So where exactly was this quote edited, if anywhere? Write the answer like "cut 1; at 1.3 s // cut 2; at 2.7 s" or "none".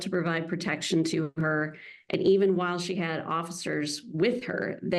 none